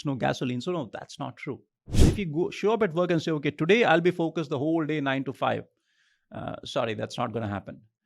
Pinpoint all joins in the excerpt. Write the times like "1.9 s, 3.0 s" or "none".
1.9 s

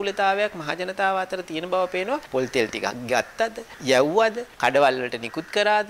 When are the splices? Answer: 2.3 s, 3.7 s, 4.5 s

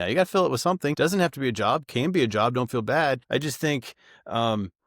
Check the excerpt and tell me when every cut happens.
0.9 s, 3.2 s

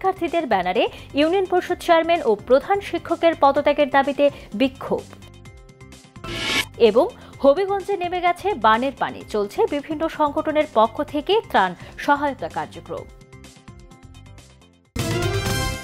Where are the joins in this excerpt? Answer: 14.9 s

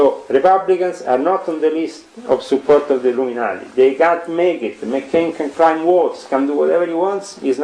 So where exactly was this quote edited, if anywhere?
none

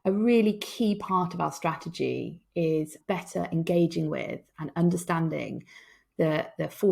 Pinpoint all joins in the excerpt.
3.0 s

